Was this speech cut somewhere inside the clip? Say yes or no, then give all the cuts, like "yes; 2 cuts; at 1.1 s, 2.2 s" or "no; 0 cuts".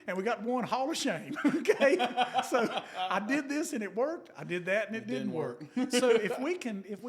no; 0 cuts